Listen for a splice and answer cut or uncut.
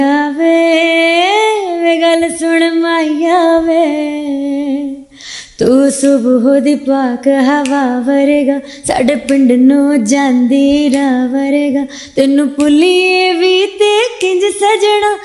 uncut